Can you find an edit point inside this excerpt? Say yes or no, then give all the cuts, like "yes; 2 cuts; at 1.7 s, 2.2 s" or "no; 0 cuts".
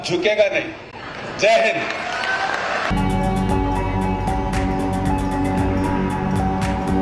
no; 0 cuts